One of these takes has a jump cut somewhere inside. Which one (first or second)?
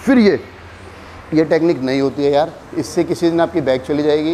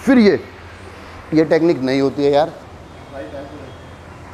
second